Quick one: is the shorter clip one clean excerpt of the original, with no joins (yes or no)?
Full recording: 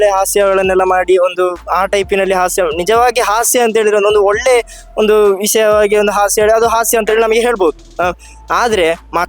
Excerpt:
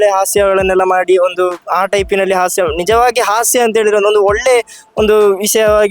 yes